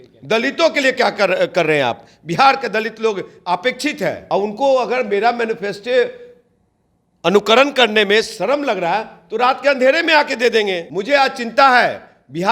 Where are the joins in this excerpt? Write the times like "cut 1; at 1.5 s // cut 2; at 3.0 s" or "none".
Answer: cut 1; at 4.2 s // cut 2; at 10.9 s